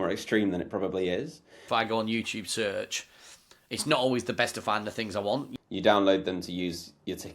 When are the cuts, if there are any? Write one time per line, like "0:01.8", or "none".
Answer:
0:01.6
0:05.5